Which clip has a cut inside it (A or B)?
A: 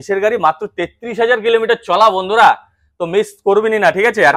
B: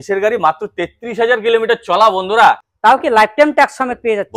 B